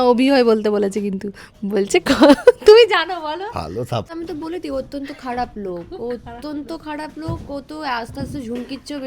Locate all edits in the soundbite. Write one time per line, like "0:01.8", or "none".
0:04.1